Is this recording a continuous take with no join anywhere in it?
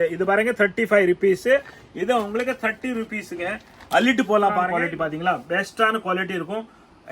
no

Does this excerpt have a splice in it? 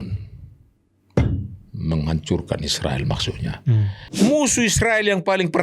yes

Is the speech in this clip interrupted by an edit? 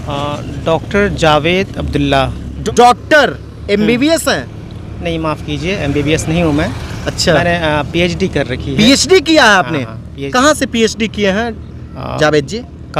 yes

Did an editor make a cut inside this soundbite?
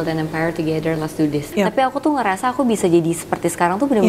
yes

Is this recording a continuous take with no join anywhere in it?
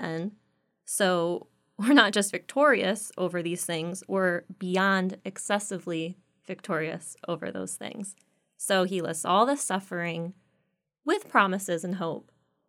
yes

